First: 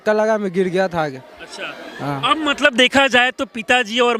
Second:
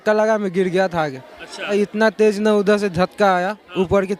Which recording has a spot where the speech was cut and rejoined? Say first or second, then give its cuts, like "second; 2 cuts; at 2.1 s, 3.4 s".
second; 1 cut; at 1.7 s